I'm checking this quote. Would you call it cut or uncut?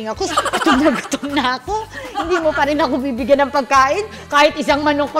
uncut